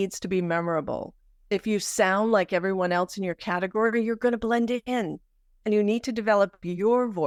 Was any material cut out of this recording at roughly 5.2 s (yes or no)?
no